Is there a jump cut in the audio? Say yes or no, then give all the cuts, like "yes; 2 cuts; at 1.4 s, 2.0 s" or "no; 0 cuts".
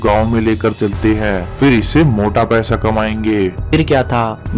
yes; 1 cut; at 3.6 s